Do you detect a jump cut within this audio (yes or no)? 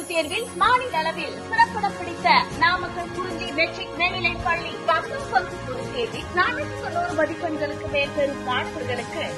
no